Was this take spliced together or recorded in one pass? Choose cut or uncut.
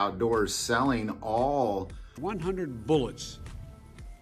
cut